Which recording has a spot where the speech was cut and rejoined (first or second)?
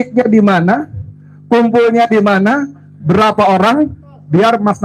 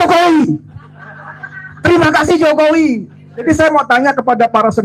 second